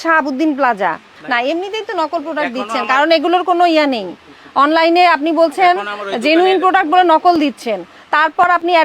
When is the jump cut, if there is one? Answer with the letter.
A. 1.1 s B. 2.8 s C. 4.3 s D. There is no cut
A